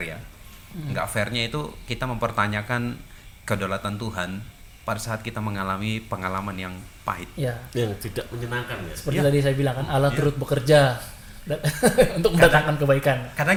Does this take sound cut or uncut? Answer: uncut